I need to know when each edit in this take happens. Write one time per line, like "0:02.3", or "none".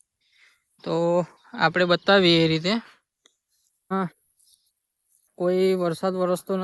0:03.9